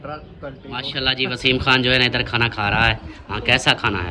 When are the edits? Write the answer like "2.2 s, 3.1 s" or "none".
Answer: 1.0 s